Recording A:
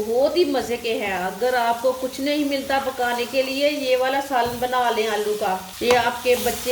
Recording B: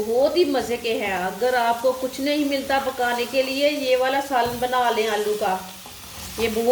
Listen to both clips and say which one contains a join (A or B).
A